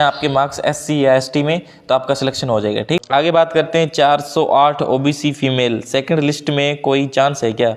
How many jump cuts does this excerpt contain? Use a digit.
1